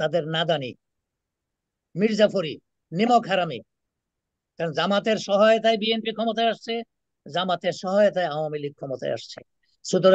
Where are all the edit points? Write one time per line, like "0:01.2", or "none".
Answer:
none